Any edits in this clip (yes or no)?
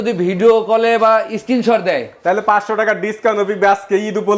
no